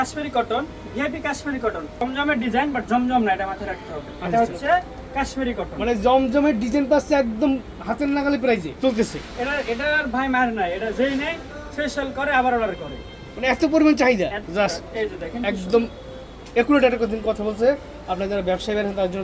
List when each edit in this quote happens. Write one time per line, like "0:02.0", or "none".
0:02.0
0:08.7
0:14.4